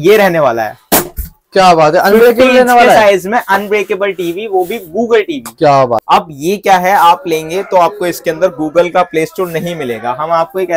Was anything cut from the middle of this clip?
yes; 1 cut; at 6.0 s

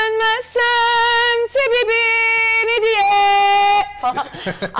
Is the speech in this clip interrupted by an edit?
no; 0 cuts

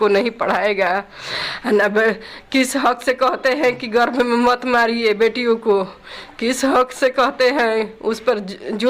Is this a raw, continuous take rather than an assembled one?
yes; 0 cuts

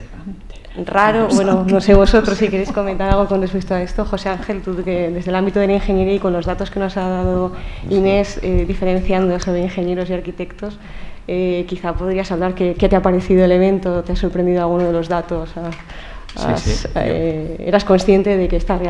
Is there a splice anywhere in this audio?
no; 0 cuts

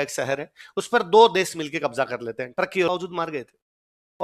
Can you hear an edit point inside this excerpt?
yes; 1 cut; at 2.9 s

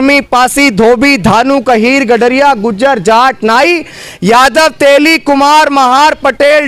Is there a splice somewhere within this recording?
no; 0 cuts

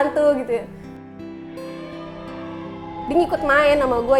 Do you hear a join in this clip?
no; 0 cuts

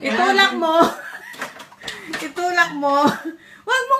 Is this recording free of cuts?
no; 1 cut; at 2.7 s

